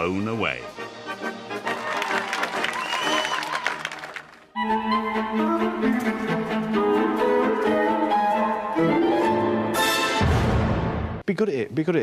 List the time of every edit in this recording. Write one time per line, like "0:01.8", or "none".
0:05.9